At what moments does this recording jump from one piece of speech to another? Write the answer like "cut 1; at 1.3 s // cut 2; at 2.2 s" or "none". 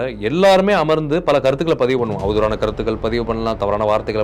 none